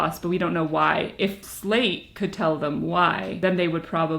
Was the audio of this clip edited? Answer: yes; 2 cuts; at 1.5 s, 3.3 s

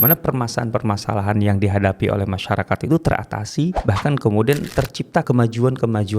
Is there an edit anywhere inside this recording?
yes; 2 cuts; at 3.8 s, 5.2 s

